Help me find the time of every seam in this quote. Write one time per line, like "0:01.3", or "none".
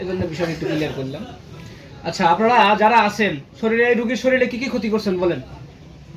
none